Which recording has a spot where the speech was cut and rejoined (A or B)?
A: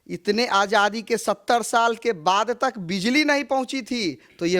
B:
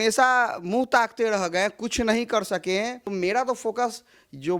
B